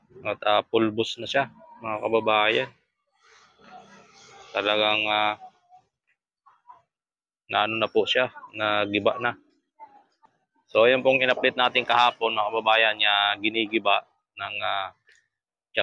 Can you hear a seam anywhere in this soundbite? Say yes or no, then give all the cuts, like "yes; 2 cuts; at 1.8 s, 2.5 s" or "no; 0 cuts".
no; 0 cuts